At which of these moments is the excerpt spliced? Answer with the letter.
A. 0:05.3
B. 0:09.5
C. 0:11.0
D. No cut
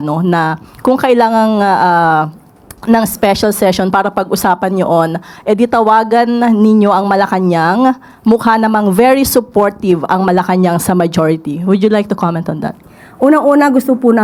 D